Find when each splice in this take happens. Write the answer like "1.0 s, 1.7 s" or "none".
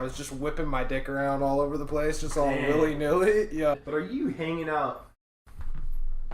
3.7 s